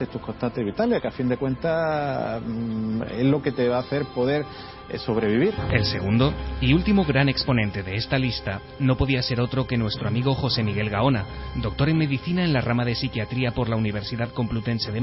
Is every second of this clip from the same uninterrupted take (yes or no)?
yes